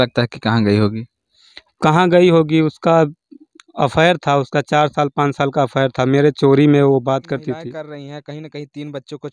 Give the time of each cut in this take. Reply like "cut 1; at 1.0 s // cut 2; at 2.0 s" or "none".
cut 1; at 7.5 s